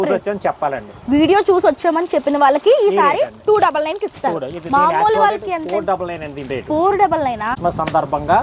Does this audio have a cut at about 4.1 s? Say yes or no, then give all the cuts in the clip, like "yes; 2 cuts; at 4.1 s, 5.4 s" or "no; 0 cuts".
no; 1 cut; at 7.5 s